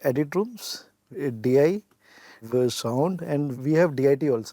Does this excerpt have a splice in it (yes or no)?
yes